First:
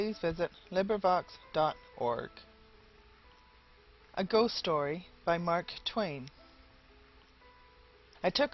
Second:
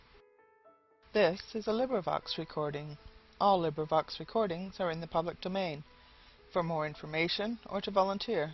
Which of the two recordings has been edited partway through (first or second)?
first